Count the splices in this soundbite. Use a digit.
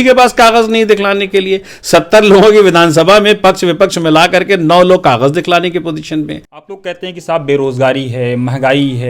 1